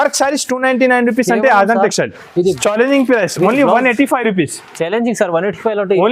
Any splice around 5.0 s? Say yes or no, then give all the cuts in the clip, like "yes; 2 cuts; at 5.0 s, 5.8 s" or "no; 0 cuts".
no; 1 cut; at 2.6 s